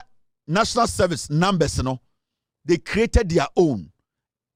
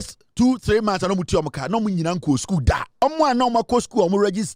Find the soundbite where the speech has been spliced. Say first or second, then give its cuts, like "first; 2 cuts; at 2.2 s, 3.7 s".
second; 1 cut; at 3.0 s